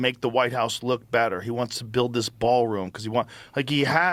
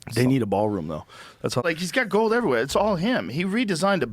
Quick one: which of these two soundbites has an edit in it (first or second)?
second